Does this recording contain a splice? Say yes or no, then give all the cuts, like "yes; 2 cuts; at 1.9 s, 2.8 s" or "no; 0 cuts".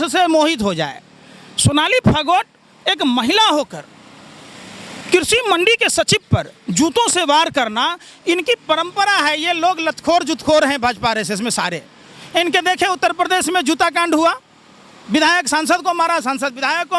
no; 0 cuts